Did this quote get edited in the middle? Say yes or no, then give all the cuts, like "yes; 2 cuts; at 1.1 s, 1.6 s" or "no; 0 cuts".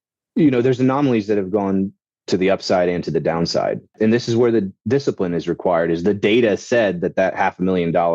yes; 1 cut; at 4.0 s